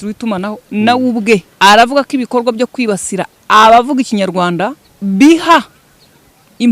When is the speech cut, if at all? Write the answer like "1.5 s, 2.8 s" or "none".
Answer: 1.5 s, 4.8 s